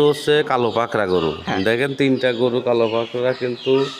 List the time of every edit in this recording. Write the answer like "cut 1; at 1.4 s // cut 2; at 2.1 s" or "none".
none